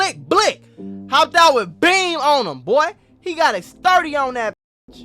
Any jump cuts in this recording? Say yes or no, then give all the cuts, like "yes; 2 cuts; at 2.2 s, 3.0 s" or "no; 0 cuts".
no; 0 cuts